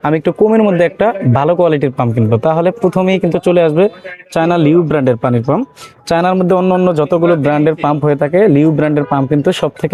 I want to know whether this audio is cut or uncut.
uncut